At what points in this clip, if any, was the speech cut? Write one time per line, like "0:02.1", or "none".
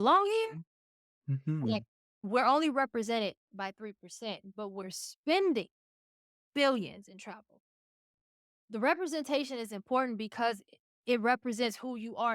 0:02.3